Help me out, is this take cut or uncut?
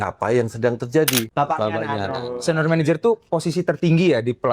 cut